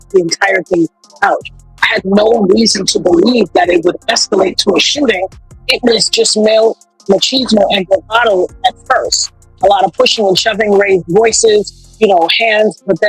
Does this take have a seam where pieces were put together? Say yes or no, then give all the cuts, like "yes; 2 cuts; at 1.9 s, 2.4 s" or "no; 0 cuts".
no; 0 cuts